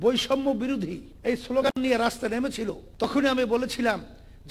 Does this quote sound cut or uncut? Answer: cut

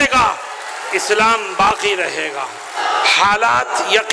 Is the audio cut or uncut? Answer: cut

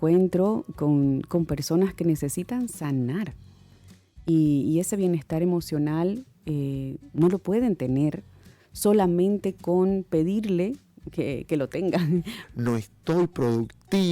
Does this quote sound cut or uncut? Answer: cut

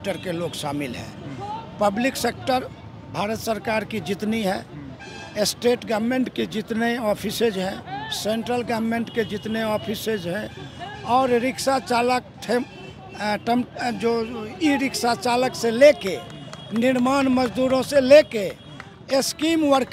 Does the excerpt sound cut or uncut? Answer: uncut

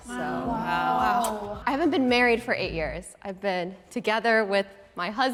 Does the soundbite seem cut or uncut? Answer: uncut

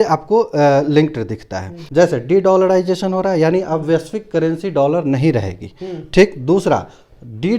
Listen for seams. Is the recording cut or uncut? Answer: cut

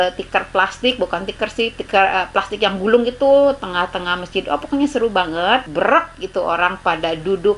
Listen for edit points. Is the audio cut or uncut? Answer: cut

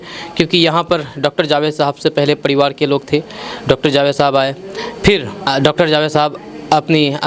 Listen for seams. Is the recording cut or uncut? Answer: uncut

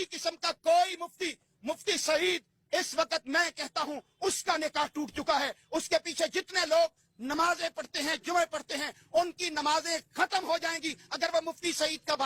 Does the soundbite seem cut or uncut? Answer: uncut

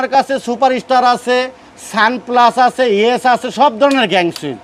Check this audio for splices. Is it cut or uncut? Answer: uncut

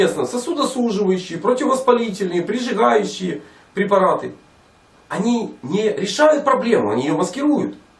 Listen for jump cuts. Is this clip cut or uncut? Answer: cut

